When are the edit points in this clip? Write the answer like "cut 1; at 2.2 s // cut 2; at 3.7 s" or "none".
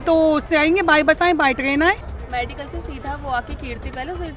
cut 1; at 2.1 s